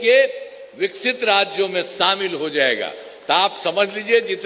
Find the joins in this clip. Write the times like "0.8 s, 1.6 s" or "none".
none